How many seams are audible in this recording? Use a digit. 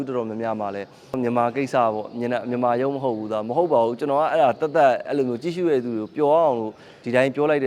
1